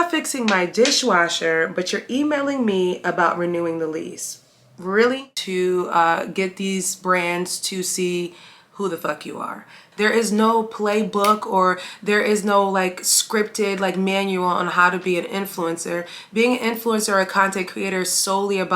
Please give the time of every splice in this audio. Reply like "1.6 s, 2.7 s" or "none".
5.4 s, 9.8 s